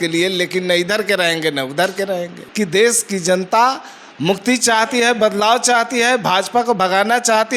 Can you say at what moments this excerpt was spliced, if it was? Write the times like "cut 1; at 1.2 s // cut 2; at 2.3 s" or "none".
cut 1; at 2.4 s

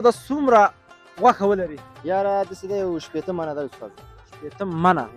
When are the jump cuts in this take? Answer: none

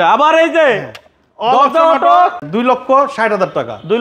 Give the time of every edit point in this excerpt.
cut 1; at 2.4 s

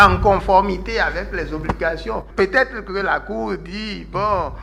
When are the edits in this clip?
none

